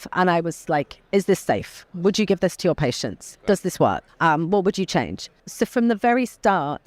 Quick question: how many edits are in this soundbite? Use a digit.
2